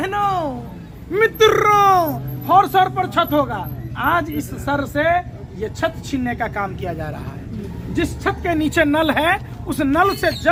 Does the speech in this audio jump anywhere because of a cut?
no; 0 cuts

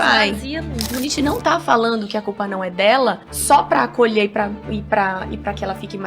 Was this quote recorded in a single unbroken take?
no; 2 cuts; at 0.9 s, 3.3 s

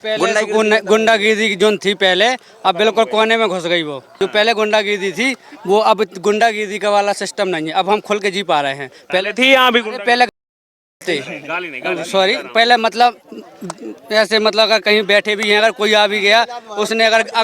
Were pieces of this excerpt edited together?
yes; 1 cut; at 4.1 s

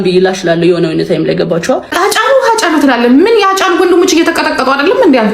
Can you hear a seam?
yes; 2 cuts; at 1.1 s, 1.9 s

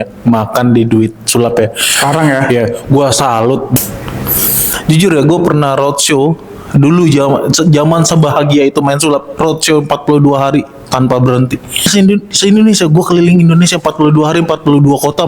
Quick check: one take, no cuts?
no; 2 cuts; at 3.8 s, 11.9 s

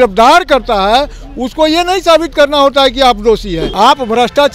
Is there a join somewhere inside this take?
yes; 1 cut; at 3.6 s

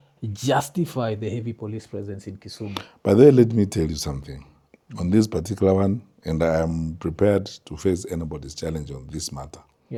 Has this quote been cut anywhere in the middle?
no; 0 cuts

